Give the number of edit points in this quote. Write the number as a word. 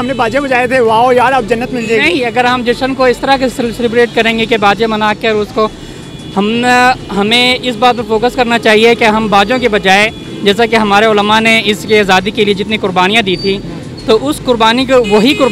zero